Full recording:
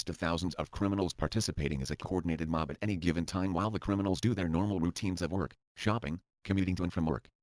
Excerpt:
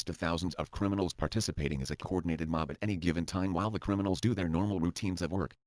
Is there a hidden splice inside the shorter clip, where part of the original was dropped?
no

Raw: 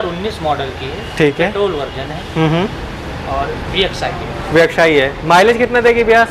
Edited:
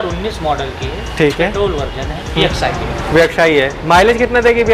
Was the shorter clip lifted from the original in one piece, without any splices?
no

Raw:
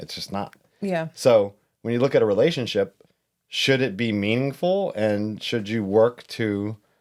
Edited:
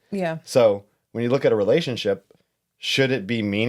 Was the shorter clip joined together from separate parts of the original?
no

